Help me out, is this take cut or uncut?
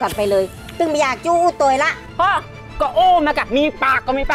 cut